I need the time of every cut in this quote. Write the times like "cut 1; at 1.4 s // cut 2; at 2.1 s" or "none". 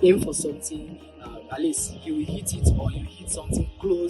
none